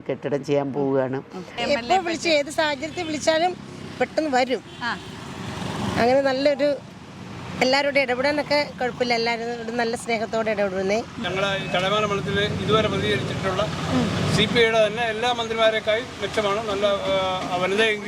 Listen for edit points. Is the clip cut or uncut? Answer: cut